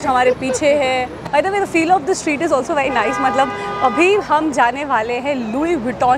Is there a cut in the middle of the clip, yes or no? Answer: no